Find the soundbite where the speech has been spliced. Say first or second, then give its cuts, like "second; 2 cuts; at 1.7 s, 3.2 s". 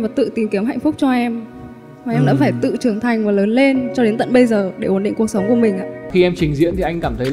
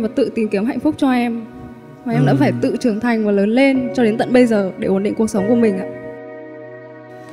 first; 1 cut; at 6.1 s